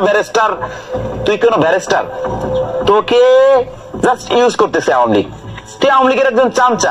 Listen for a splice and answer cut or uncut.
uncut